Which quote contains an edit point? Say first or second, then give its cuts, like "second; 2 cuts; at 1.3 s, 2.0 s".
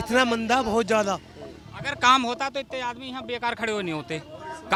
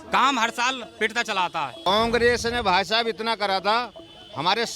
second; 1 cut; at 1.8 s